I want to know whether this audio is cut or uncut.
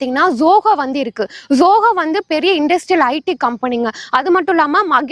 uncut